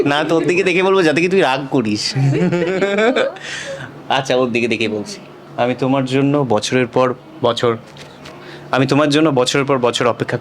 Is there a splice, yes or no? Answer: no